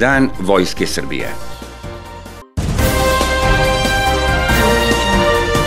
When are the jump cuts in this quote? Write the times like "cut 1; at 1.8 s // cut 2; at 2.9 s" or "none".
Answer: cut 1; at 2.4 s